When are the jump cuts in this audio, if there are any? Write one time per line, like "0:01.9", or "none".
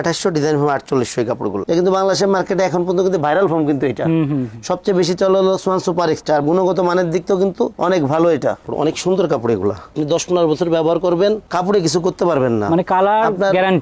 0:01.6
0:08.6